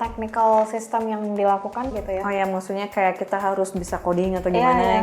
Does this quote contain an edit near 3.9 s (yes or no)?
no